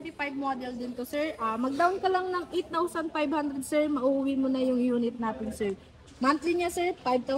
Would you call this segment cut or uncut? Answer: uncut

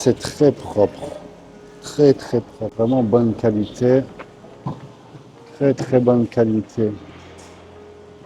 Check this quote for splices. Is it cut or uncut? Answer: cut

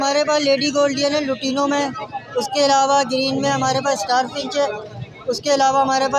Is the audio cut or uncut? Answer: uncut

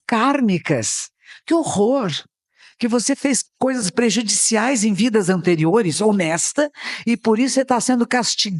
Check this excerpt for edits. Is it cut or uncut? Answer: uncut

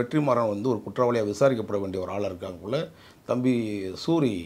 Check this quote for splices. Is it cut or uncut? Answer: uncut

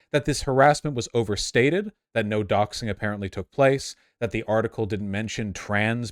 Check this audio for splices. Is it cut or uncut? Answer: uncut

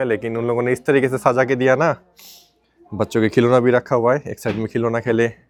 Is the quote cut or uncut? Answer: uncut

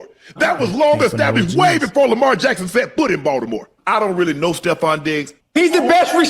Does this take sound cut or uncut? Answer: cut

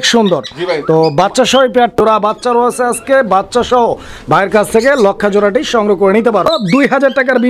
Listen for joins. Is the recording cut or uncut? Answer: cut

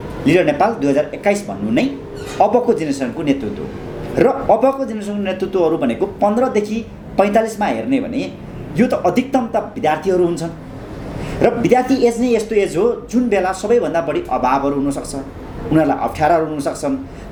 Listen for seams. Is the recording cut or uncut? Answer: uncut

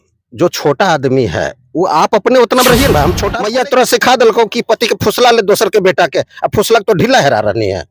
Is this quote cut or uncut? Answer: cut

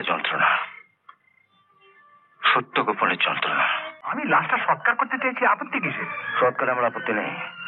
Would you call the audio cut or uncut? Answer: cut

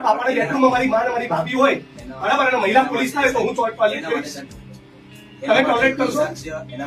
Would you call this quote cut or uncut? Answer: uncut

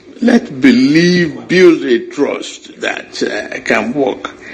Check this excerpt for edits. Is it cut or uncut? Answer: uncut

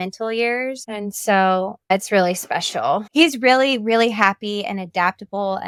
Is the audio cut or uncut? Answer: uncut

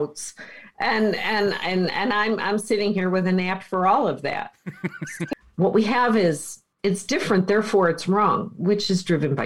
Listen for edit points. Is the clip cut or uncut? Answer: cut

